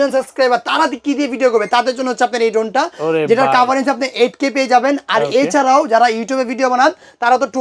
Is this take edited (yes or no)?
no